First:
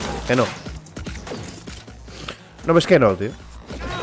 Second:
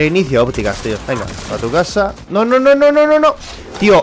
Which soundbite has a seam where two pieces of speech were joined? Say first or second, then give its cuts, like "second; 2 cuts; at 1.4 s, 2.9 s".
second; 1 cut; at 2.2 s